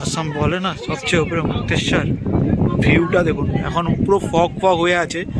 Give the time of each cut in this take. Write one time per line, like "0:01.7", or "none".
none